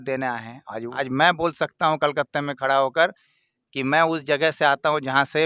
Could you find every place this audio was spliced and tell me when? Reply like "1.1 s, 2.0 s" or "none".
0.9 s